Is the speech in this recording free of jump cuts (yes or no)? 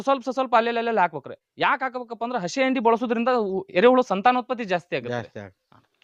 yes